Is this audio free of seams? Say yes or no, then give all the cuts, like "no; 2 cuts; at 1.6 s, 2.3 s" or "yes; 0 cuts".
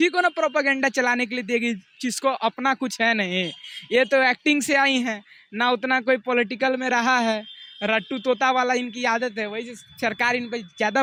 yes; 0 cuts